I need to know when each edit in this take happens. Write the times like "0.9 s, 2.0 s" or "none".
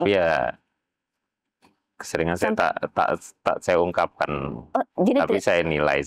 none